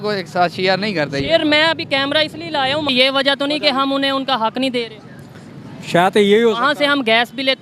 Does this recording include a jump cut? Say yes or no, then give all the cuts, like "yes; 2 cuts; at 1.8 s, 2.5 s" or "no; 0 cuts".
yes; 1 cut; at 2.9 s